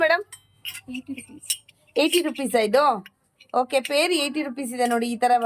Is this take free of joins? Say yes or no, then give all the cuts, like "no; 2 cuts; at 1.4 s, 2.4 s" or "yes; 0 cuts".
yes; 0 cuts